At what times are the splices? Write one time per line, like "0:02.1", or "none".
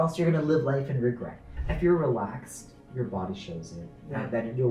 0:01.5